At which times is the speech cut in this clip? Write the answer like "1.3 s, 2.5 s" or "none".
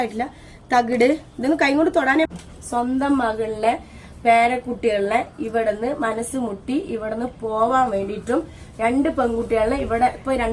2.3 s